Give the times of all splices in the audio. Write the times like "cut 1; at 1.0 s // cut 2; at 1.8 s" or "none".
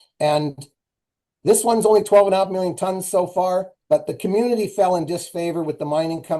cut 1; at 3.7 s